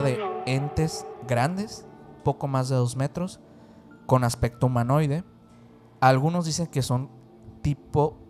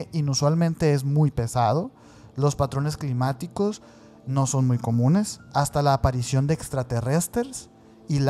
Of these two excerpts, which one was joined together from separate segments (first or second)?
first